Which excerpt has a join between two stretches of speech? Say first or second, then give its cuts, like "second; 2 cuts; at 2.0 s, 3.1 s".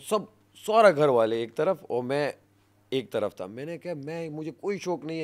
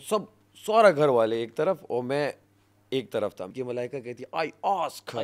second; 1 cut; at 3.5 s